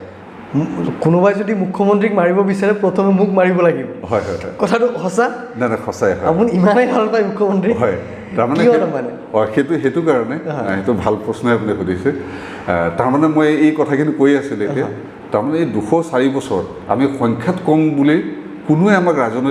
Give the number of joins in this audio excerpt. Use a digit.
0